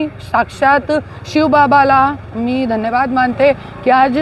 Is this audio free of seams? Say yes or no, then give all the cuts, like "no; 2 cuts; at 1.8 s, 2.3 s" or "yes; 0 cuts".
yes; 0 cuts